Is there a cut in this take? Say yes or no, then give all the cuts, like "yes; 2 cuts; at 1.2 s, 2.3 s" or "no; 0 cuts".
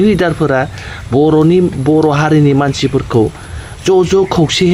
no; 0 cuts